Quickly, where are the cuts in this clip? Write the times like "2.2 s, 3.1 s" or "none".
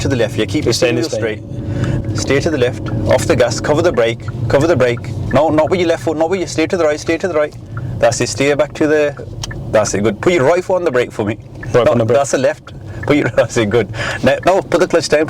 2.0 s